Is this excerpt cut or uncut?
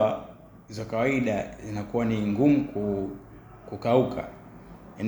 uncut